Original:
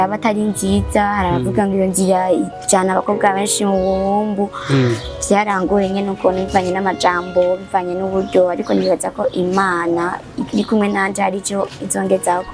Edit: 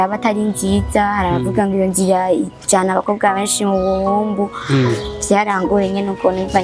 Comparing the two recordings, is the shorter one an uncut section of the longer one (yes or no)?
yes